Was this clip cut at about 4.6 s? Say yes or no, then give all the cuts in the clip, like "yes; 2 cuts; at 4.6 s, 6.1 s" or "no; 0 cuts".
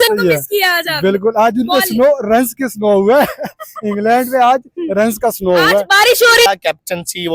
no; 1 cut; at 6.5 s